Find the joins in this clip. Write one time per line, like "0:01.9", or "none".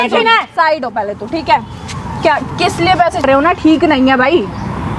0:03.2